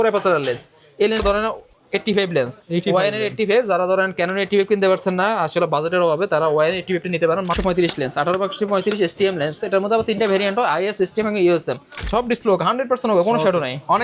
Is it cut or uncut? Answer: cut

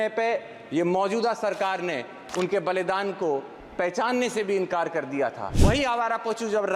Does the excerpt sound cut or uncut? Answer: cut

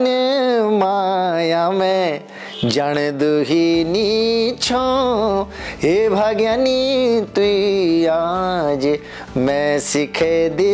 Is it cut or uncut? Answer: uncut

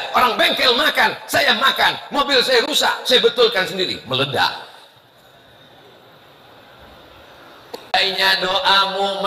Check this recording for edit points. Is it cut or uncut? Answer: cut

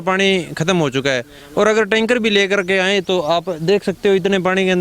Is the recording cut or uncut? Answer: uncut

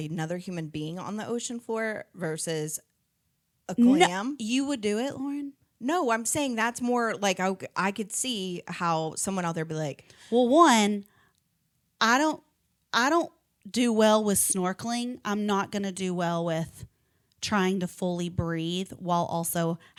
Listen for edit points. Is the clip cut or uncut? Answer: uncut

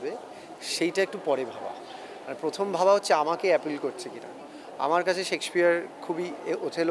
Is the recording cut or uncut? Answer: uncut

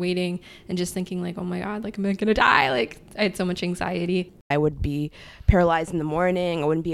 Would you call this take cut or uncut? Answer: cut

